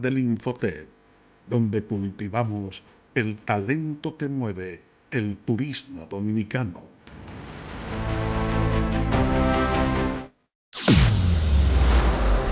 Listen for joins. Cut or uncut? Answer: cut